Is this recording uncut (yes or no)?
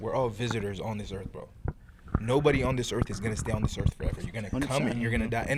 yes